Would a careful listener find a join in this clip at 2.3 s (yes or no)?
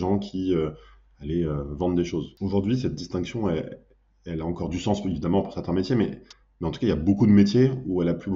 yes